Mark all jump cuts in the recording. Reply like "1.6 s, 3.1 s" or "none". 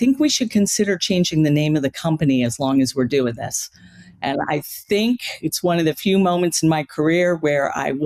none